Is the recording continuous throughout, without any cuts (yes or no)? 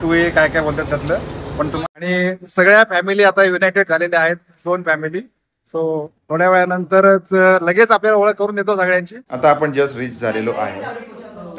no